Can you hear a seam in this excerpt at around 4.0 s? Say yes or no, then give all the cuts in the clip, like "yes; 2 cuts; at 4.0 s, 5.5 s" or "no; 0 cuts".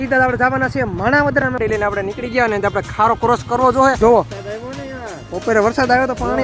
yes; 2 cuts; at 1.6 s, 4.0 s